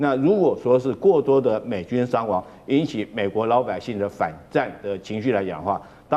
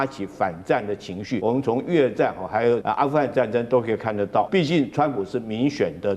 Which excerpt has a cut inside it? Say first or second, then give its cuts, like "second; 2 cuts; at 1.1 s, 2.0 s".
second; 3 cuts; at 1.4 s, 2.8 s, 4.5 s